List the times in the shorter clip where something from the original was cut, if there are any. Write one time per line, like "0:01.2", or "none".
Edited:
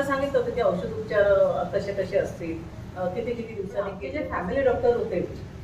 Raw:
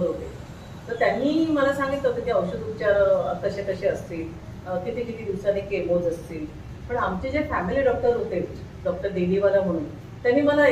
0:04.0